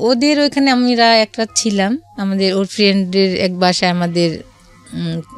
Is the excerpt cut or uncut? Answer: uncut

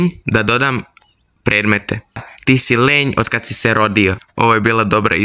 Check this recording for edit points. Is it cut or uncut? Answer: cut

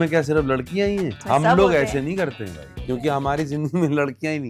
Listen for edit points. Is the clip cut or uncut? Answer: cut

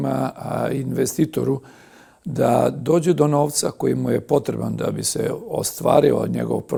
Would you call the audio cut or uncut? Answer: uncut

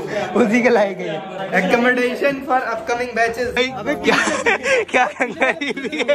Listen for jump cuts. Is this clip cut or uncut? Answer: cut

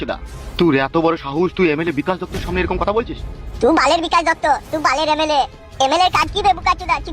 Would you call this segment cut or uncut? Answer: uncut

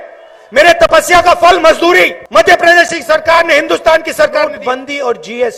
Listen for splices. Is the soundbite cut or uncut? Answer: cut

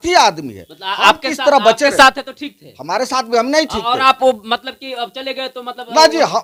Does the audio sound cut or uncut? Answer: uncut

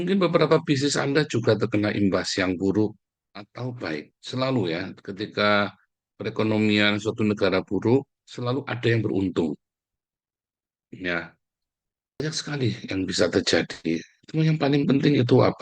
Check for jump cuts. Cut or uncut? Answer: cut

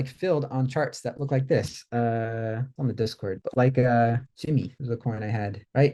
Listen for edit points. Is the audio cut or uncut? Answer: uncut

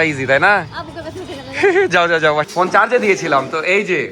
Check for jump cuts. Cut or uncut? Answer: cut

